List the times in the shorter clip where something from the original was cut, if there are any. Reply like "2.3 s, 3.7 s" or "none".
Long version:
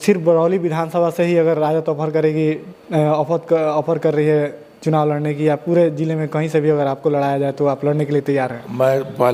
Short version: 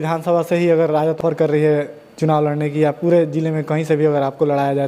1.2 s